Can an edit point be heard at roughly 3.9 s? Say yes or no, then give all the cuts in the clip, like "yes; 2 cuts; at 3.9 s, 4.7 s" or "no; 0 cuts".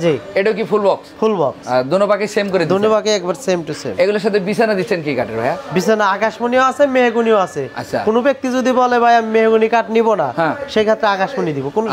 no; 0 cuts